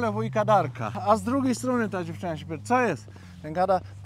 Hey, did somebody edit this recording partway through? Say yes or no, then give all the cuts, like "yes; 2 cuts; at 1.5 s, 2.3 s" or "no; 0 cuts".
yes; 1 cut; at 0.9 s